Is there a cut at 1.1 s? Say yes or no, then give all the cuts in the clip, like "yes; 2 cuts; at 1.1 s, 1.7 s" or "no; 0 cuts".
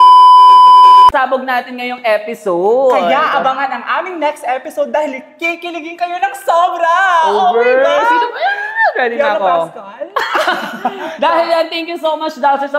yes; 1 cut; at 1.1 s